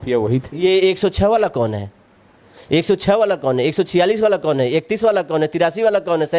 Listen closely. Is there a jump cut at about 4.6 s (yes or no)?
no